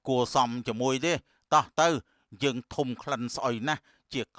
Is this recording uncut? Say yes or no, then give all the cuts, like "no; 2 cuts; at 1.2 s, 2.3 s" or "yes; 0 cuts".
yes; 0 cuts